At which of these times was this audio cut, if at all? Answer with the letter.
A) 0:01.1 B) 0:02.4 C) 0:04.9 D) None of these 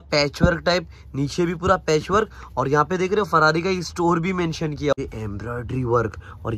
C